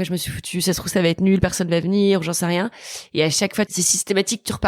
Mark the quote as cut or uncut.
cut